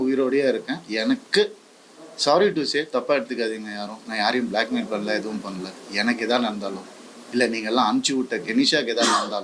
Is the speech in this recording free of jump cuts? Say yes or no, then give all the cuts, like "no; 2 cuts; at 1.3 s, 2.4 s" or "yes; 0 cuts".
yes; 0 cuts